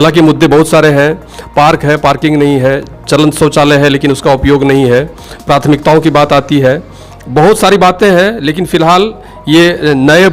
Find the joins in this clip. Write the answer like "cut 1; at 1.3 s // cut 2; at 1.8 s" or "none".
none